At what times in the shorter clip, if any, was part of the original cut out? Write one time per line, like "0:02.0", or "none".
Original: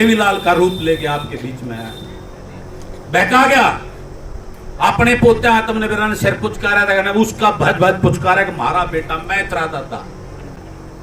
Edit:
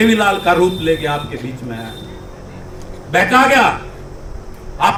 none

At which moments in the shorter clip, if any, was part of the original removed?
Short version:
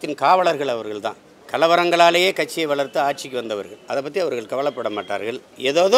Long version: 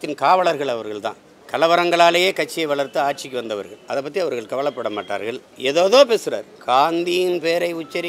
none

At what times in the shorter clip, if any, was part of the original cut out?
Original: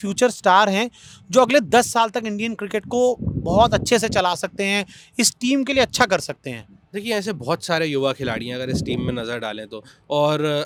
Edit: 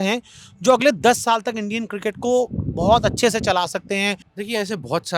0:04.3

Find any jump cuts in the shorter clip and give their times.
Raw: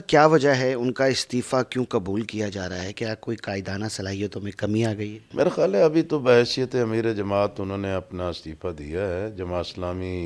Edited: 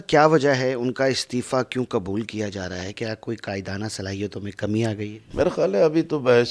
none

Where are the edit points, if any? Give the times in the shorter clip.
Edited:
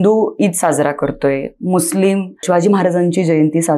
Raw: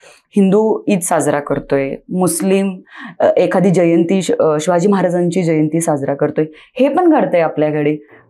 0:02.4

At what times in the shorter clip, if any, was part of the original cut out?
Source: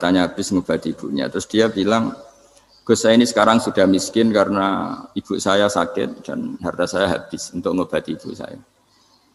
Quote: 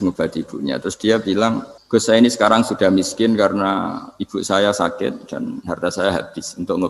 0:01.7

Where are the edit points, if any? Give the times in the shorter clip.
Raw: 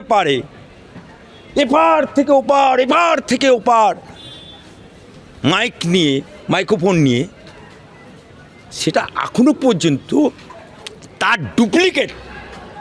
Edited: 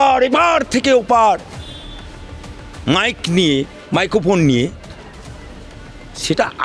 none

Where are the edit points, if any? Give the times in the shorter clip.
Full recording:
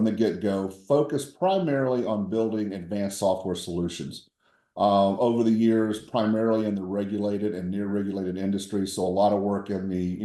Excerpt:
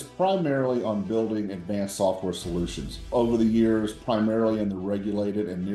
0:03.1

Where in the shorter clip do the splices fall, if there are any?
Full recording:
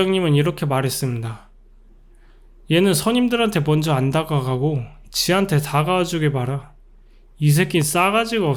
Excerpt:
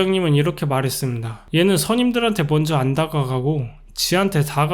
0:01.3

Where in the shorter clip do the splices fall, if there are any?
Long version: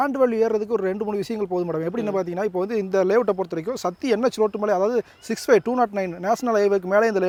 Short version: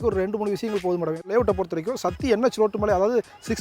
0:01.3

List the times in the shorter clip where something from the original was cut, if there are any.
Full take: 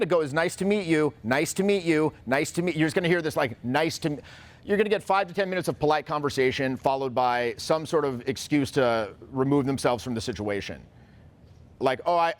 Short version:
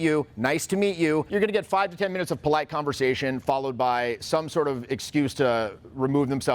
0:01.3

